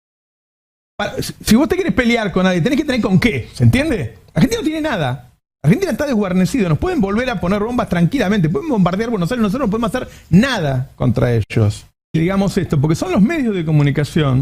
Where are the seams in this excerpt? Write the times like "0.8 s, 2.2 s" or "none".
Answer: 12.2 s